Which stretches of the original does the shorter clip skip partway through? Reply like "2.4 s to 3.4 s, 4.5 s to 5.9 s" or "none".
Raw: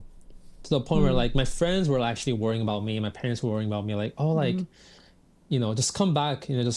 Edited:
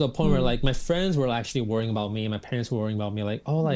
none

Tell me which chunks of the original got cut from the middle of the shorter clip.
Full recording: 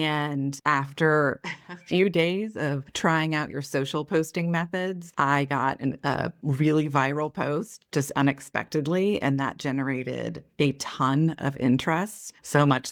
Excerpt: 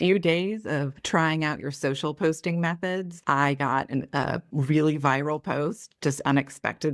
none

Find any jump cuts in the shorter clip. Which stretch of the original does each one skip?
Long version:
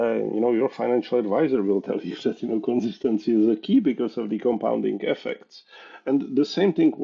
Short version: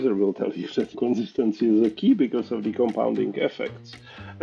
2.4 s to 2.6 s

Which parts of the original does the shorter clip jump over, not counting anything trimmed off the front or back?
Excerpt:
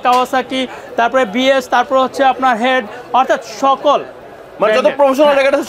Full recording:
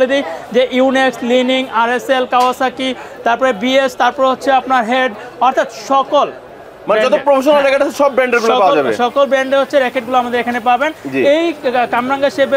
none

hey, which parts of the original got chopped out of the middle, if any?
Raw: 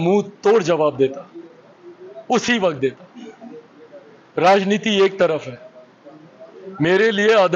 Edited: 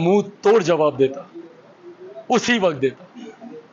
none

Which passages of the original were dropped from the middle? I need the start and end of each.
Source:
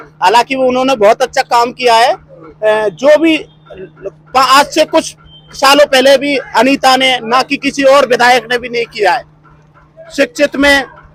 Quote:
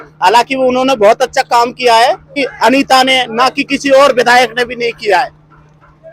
2.4 s to 6.4 s

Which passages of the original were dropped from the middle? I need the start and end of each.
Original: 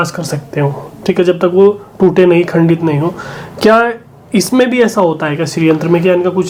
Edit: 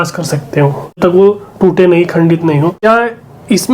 1.0 s to 1.4 s, 3.2 s to 3.7 s

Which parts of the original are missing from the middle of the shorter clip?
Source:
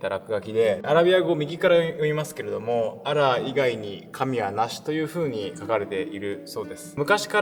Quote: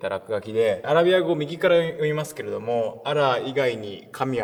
none

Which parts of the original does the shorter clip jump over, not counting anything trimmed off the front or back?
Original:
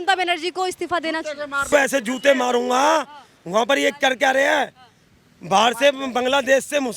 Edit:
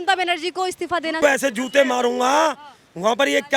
1.2 s to 1.7 s

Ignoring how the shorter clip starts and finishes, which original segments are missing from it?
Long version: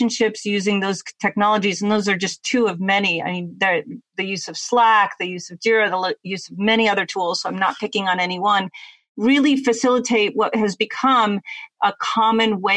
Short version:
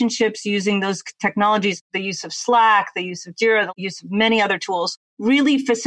1.8 s to 4.0 s, 5.9 s to 6.2 s, 7.4 s to 9.0 s

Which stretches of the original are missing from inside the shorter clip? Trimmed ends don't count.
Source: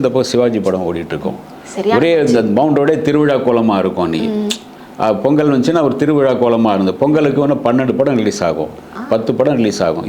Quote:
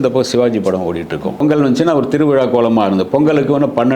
1.4 s to 5.3 s

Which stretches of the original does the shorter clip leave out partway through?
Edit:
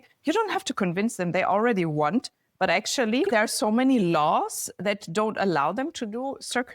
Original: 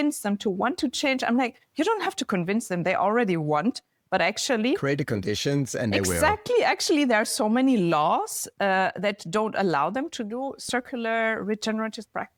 4.8 s to 7.1 s, 8.5 s to 8.9 s

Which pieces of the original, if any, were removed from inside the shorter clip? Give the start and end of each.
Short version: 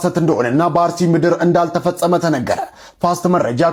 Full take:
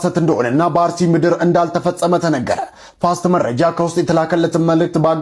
none

